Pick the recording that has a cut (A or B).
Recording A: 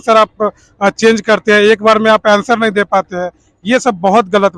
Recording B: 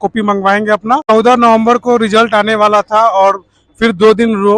B